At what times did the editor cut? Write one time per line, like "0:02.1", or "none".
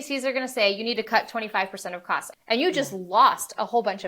0:02.3

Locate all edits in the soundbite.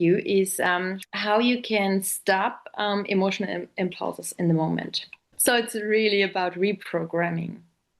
0:01.0
0:05.3

